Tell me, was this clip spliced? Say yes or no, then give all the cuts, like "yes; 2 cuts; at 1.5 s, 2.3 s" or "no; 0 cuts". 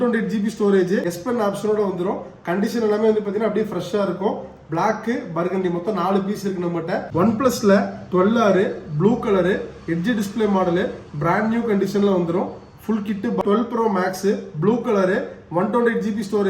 yes; 3 cuts; at 1.1 s, 7.1 s, 13.4 s